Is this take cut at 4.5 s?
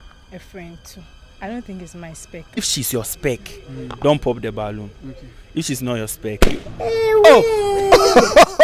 no; 3 cuts; at 1.1 s, 2.6 s, 7.7 s

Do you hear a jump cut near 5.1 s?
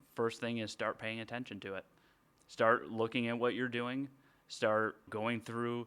yes; 2 cuts; at 2.3 s, 5.1 s

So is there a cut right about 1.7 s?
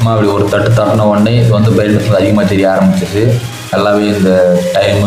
no; 1 cut; at 3.7 s

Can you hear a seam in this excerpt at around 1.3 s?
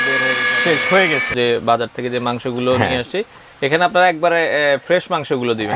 yes; 1 cut; at 1.3 s

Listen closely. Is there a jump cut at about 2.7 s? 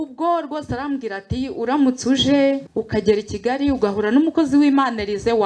yes; 1 cut; at 2.7 s

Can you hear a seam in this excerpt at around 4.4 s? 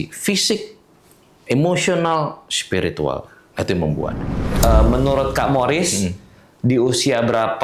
yes; 1 cut; at 4.4 s

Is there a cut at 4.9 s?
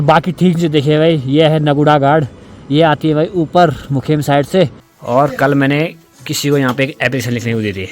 yes; 1 cut; at 4.9 s

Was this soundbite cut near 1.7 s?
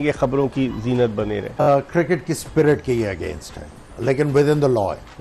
yes; 1 cut; at 1.7 s

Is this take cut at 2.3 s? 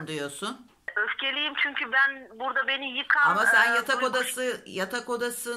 no; 1 cut; at 0.9 s

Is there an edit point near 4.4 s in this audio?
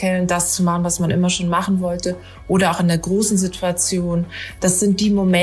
yes; 1 cut; at 4.4 s

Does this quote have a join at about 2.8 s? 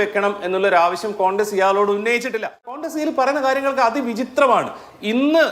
yes; 1 cut; at 2.8 s

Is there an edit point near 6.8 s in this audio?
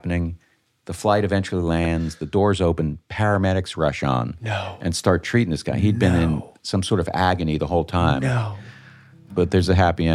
no; 1 cut; at 9.2 s

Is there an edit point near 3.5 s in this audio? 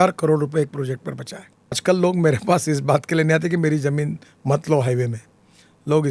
no; 1 cut; at 1.8 s

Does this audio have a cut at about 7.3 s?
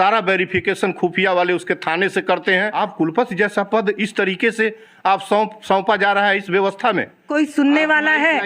yes; 2 cuts; at 2.8 s, 7.3 s

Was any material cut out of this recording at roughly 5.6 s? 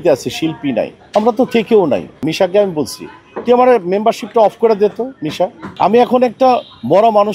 yes; 3 cuts; at 1.0 s, 2.2 s, 5.6 s

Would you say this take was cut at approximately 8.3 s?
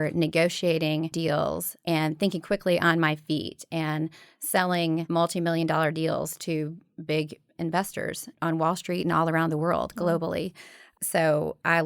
yes; 3 cuts; at 1.7 s, 5.1 s, 8.3 s

